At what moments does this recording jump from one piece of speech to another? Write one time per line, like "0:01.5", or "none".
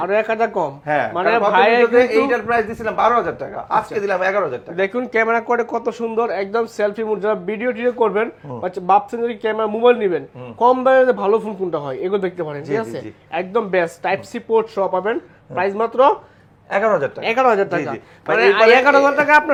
none